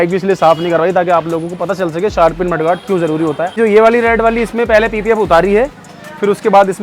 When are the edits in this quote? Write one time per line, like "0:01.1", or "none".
0:03.6